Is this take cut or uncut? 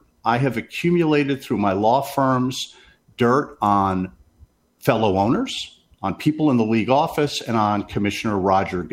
uncut